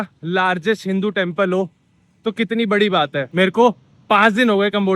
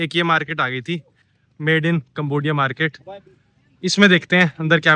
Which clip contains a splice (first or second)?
first